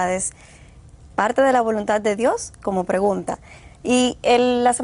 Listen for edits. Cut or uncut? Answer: uncut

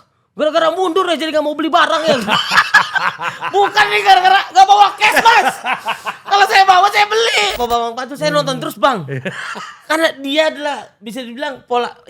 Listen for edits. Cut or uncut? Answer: cut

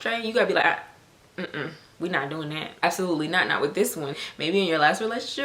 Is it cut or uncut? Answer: cut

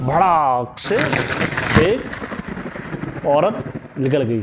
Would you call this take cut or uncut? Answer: uncut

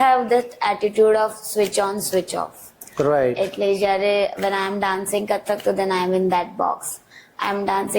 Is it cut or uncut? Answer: uncut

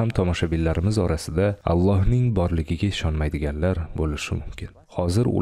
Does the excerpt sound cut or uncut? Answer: uncut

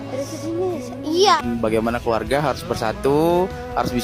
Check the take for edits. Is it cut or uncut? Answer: cut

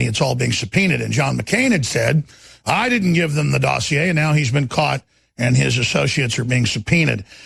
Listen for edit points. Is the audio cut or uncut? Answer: uncut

